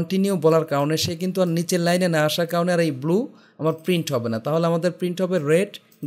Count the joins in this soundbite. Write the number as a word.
zero